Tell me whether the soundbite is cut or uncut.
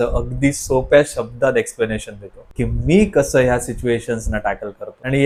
uncut